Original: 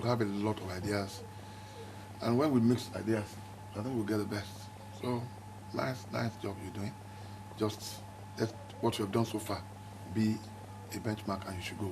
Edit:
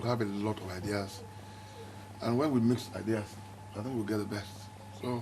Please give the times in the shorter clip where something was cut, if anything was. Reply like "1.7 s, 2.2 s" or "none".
none